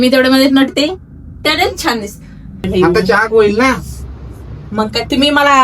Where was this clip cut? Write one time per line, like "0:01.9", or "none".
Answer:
0:02.6